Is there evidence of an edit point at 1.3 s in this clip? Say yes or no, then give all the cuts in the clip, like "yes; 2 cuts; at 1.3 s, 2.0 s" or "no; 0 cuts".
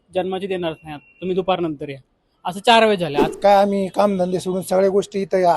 no; 1 cut; at 3.3 s